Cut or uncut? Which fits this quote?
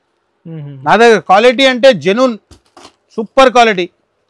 uncut